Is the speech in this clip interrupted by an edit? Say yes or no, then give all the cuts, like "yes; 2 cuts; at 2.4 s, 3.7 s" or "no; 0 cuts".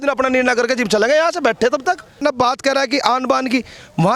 yes; 1 cut; at 2.2 s